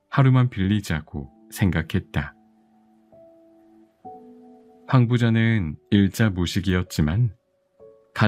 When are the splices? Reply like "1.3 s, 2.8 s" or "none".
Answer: 2.4 s, 4.5 s

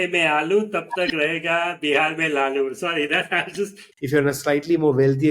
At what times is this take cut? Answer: 3.9 s

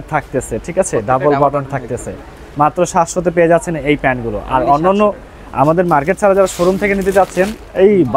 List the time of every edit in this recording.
none

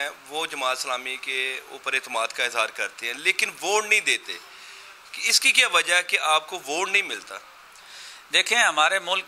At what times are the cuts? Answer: none

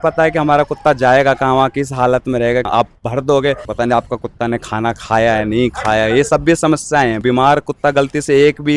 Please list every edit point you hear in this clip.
2.7 s, 3.7 s, 7.2 s

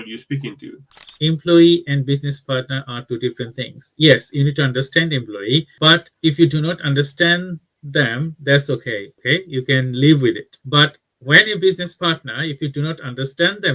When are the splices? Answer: 1.1 s, 10.5 s

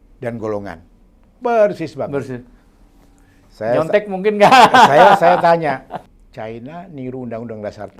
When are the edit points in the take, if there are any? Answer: 6.2 s

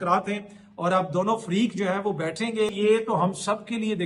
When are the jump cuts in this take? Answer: 2.7 s

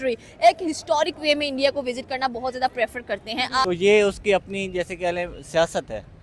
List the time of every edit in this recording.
3.6 s

